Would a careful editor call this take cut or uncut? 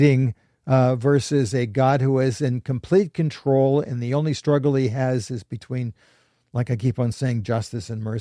uncut